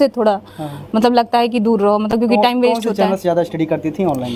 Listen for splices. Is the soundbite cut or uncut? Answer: uncut